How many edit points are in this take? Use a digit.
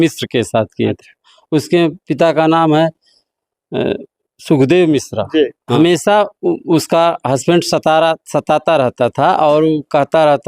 1